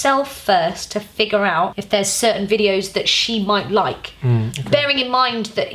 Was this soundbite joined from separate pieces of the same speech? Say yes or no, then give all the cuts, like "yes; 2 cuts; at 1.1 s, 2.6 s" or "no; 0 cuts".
yes; 1 cut; at 1.8 s